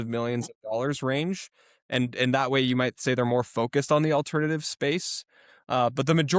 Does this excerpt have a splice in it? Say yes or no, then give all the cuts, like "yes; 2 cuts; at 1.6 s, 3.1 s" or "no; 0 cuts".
no; 0 cuts